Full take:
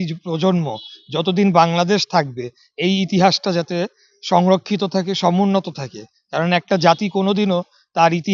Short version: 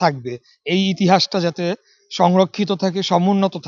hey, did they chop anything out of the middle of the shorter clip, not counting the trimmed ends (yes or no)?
no